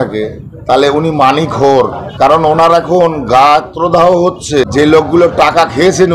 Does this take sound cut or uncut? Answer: cut